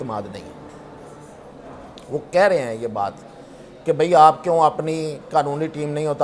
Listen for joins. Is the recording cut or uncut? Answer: uncut